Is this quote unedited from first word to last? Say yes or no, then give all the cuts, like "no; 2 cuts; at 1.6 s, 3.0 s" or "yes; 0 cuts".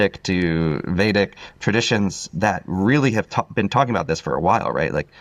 yes; 0 cuts